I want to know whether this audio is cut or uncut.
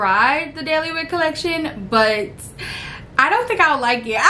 uncut